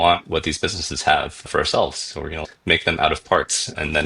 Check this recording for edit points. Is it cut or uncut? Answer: cut